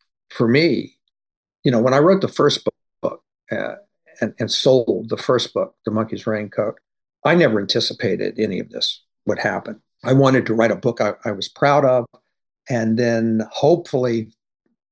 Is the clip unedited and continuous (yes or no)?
yes